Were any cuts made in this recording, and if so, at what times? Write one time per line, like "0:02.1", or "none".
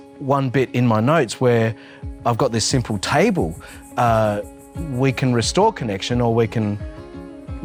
none